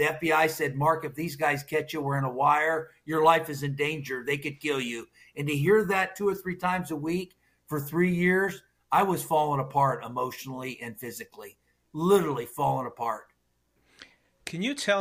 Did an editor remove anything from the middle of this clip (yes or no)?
no